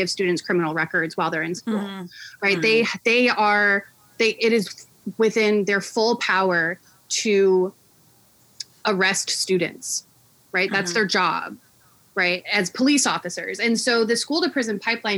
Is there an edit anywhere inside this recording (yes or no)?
no